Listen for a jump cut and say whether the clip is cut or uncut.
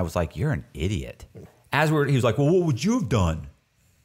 cut